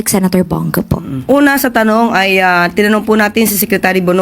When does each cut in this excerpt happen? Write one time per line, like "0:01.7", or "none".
0:01.1